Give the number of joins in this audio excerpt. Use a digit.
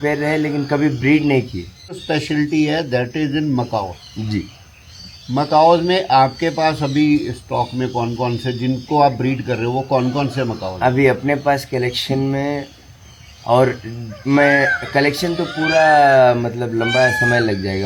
1